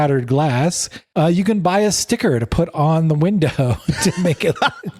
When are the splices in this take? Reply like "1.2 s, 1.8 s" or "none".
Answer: none